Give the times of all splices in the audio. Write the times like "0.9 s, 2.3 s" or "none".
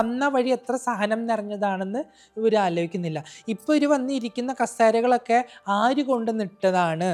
none